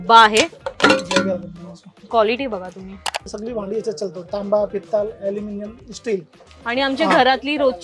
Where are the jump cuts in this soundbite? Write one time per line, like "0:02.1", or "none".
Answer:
0:03.3